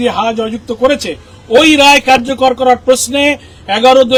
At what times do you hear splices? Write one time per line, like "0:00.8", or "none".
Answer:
none